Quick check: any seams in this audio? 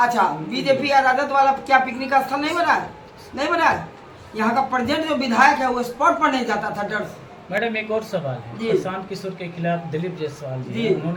no; 0 cuts

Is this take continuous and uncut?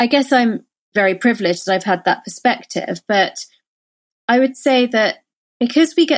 no; 1 cut; at 0.9 s

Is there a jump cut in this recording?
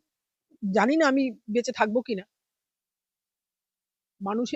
no; 0 cuts

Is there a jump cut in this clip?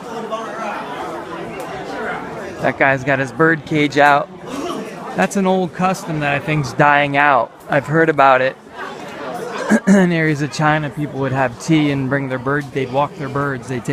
yes; 1 cut; at 0.9 s

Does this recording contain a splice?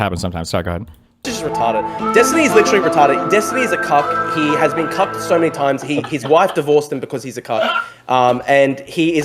yes; 1 cut; at 1.3 s

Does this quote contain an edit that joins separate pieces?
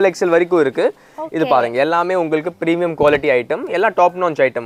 no; 0 cuts

